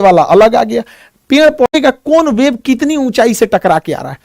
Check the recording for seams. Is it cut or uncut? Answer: cut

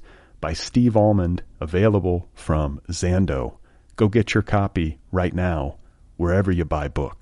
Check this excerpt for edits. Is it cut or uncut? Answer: uncut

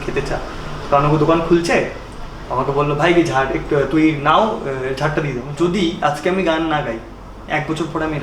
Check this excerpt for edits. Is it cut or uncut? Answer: cut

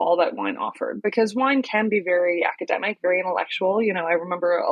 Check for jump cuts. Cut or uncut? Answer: uncut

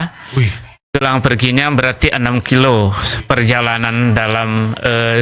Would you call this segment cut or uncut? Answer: cut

